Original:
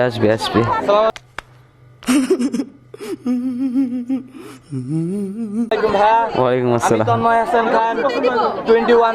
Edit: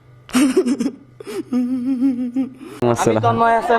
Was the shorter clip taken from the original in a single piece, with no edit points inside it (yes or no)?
no